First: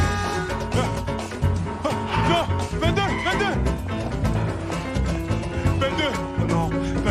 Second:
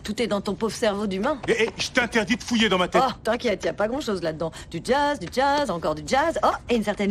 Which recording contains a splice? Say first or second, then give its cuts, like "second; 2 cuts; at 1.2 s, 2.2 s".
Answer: second; 2 cuts; at 3.0 s, 4.5 s